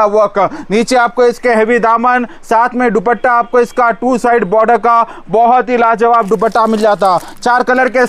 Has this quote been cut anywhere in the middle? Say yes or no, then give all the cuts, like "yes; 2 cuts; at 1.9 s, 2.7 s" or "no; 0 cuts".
no; 0 cuts